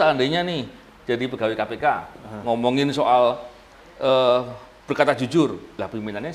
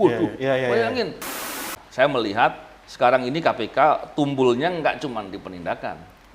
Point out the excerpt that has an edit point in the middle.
second; 1 cut; at 1.4 s

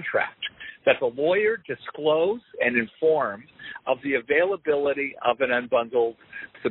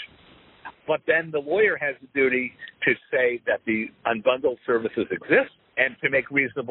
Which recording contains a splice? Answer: second; 2 cuts; at 3.9 s, 5.6 s

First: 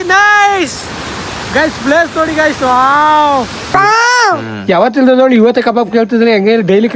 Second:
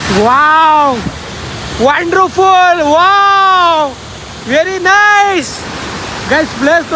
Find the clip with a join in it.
first; 1 cut; at 3.7 s

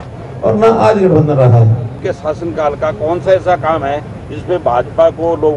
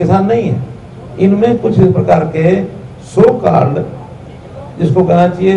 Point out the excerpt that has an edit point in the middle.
first; 1 cut; at 2.1 s

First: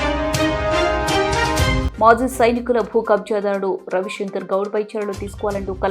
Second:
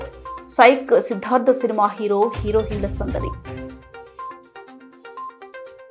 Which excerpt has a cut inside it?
first; 1 cut; at 1.8 s

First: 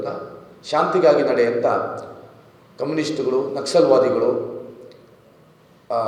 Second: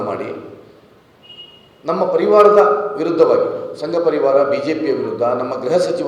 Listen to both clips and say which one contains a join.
second; 1 cut; at 1.1 s

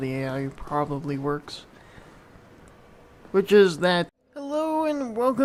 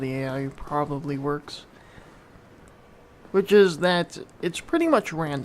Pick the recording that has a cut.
second; 1 cut; at 4.2 s

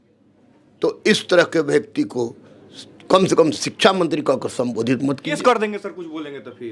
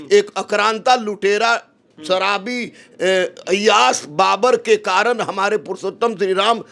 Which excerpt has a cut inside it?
first; 1 cut; at 5.2 s

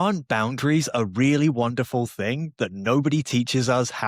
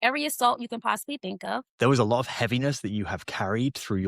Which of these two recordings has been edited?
second; 1 cut; at 1.7 s

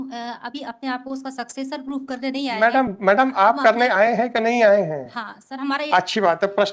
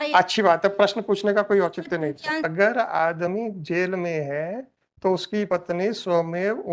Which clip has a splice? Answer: second; 1 cut; at 2.5 s

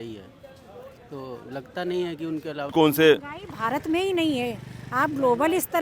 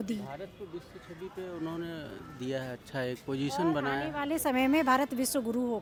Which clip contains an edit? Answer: first; 1 cut; at 2.7 s

